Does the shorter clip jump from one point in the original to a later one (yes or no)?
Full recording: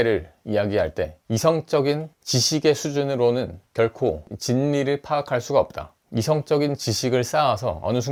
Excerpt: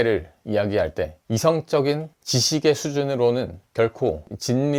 no